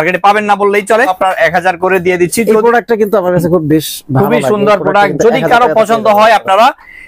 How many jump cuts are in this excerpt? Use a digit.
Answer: 1